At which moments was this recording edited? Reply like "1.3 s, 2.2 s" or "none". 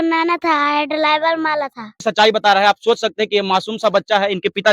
1.9 s